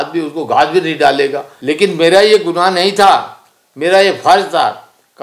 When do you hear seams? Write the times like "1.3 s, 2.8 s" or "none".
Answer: 1.5 s